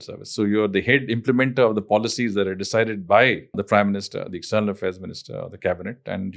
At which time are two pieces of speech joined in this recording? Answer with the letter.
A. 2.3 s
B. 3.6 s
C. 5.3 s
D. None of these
B